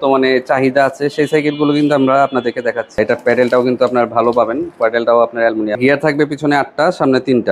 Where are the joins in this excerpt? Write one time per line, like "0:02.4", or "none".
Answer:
0:03.0
0:05.8

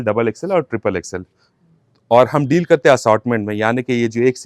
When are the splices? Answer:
none

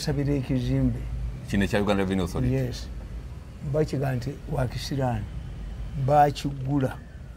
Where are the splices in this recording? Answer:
none

